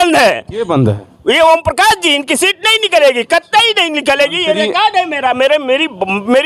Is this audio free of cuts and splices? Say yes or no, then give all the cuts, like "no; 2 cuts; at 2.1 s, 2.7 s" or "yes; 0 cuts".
yes; 0 cuts